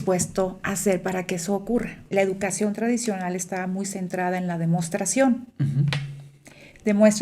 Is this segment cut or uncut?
cut